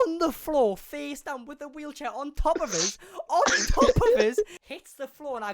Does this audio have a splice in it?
yes; 1 cut; at 4.6 s

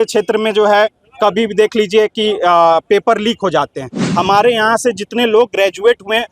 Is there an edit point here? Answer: yes; 1 cut; at 4.0 s

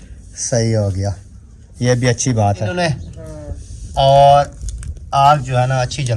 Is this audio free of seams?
no; 1 cut; at 2.7 s

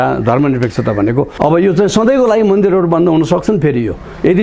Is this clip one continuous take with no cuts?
no; 1 cut; at 1.3 s

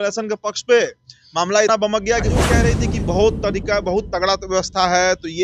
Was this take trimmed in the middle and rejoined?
yes; 1 cut; at 2.7 s

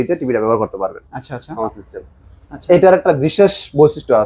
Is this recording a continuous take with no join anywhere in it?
no; 1 cut; at 1.5 s

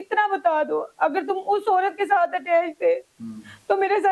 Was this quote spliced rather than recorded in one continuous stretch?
no; 0 cuts

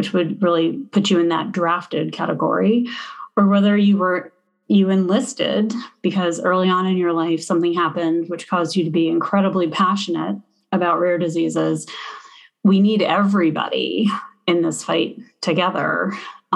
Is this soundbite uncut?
yes; 0 cuts

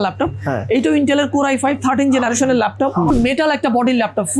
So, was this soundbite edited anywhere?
yes; 1 cut; at 3.1 s

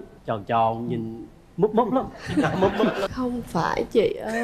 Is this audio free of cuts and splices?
no; 1 cut; at 3.1 s

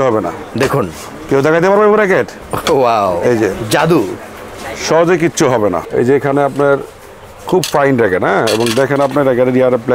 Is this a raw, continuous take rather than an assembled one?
no; 1 cut; at 5.8 s

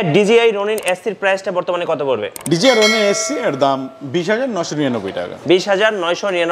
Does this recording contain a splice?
no; 0 cuts

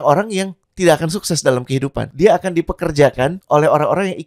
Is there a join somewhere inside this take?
yes; 2 cuts; at 2.1 s, 3.4 s

